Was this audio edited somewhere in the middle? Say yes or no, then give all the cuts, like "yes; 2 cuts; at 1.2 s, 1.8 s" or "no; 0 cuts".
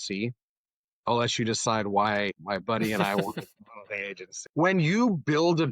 yes; 1 cut; at 4.4 s